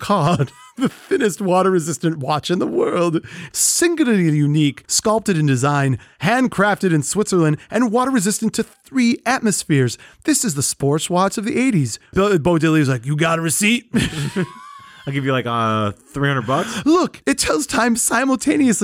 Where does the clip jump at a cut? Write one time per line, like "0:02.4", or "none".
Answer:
0:03.4
0:12.1